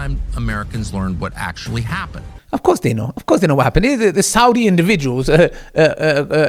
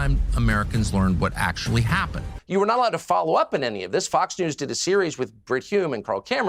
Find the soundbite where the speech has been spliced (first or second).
second